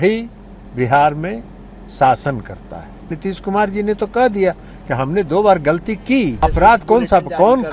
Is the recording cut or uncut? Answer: cut